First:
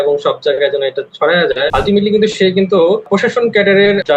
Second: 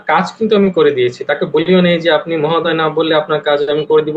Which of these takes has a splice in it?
first; 2 cuts; at 1.7 s, 3.1 s

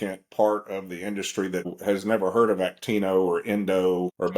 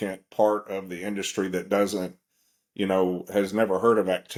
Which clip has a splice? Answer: first; 1 cut; at 1.7 s

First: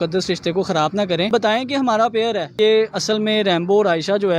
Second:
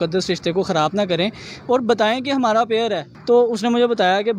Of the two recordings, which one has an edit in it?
first; 2 cuts; at 1.3 s, 2.5 s

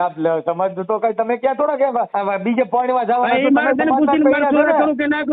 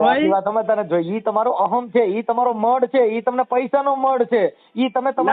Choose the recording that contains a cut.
first; 1 cut; at 2.1 s

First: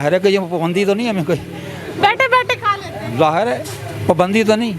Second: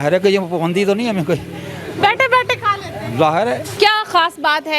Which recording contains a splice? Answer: second; 1 cut; at 3.7 s

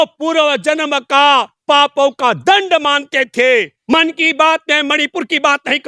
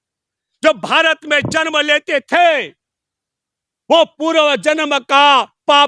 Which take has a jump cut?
first; 1 cut; at 3.8 s

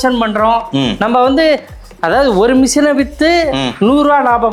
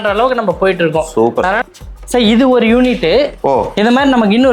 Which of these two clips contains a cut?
second; 1 cut; at 1.6 s

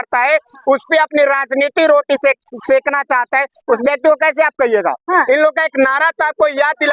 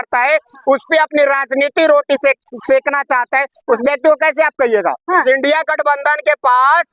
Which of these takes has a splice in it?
second; 1 cut; at 5.2 s

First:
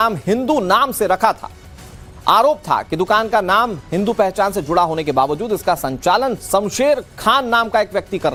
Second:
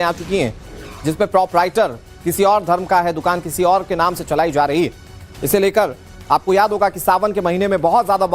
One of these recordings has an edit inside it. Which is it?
second; 1 cut; at 4.7 s

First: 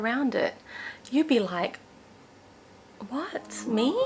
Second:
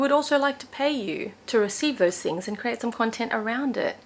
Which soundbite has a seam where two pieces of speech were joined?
second; 1 cut; at 1.3 s

